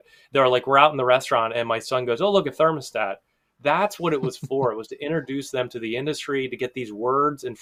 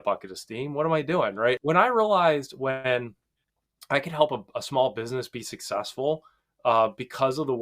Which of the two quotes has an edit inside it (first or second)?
second